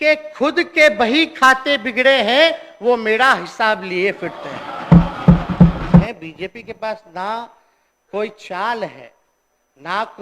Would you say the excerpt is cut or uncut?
cut